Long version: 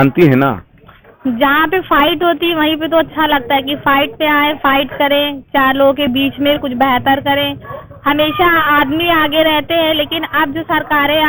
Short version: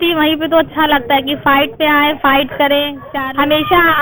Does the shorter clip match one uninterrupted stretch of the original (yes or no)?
no